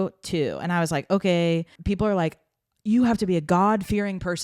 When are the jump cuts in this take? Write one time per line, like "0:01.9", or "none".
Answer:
0:01.8